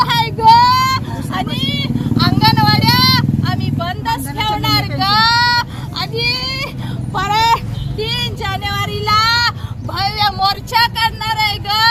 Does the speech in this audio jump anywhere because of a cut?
no; 0 cuts

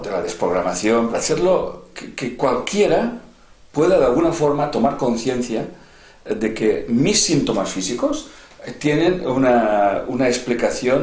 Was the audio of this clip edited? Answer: yes; 1 cut; at 1.2 s

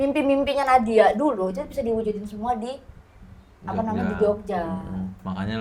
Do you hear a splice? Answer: no; 0 cuts

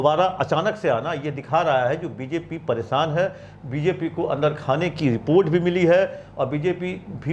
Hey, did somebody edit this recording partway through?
no; 0 cuts

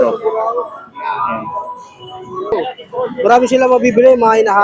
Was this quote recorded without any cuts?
no; 1 cut; at 2.5 s

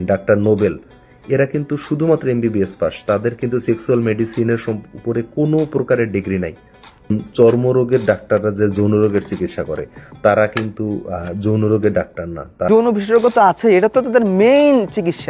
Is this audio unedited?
no; 2 cuts; at 7.1 s, 12.7 s

